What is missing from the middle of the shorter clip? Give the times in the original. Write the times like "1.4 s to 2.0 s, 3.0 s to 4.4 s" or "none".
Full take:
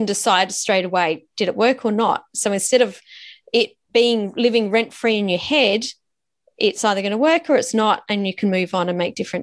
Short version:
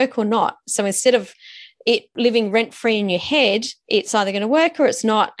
3.8 s to 4.3 s, 5.9 s to 6.4 s